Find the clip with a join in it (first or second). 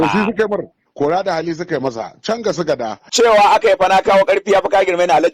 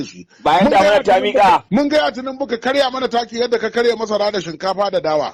first